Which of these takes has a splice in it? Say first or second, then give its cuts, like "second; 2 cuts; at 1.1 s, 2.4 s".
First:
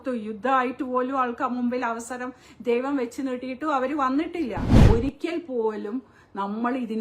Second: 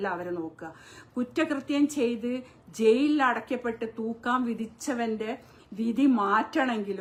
first; 1 cut; at 4.8 s